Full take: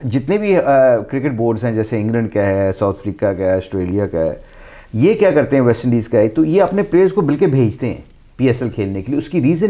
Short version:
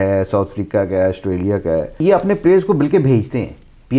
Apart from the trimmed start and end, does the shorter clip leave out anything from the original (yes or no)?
yes